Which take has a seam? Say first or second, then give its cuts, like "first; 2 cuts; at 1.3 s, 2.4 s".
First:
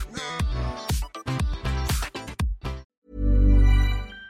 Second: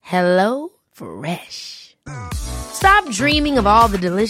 first; 1 cut; at 2.9 s